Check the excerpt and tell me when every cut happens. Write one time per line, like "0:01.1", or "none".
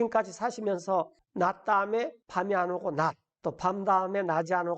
0:01.2
0:02.2
0:03.3